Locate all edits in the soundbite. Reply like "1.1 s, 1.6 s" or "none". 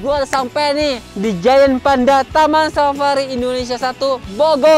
1.1 s